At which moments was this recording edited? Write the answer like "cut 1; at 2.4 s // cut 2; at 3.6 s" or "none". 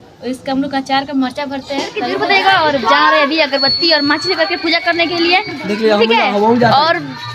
cut 1; at 2.1 s